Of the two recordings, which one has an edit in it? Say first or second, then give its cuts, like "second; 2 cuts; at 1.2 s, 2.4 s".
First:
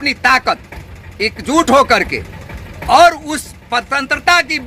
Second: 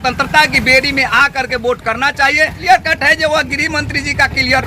second; 1 cut; at 2.6 s